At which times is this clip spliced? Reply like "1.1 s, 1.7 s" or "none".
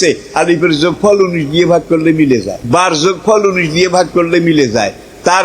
2.6 s